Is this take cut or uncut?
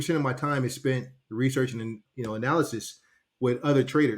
cut